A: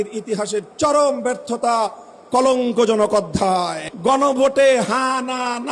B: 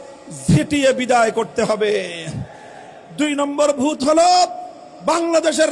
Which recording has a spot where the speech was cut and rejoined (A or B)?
A